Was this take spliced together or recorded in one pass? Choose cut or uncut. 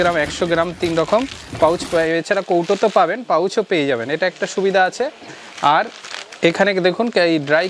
uncut